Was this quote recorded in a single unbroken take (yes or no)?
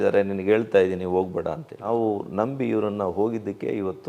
no